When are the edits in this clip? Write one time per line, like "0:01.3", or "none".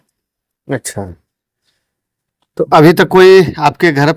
none